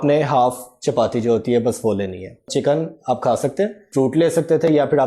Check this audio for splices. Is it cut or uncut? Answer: cut